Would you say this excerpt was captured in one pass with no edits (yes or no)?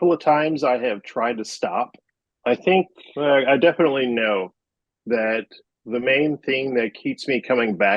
yes